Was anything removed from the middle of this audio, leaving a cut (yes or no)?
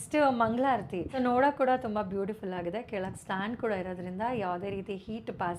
yes